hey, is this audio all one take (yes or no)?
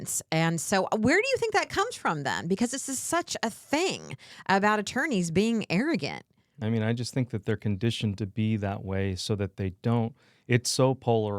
no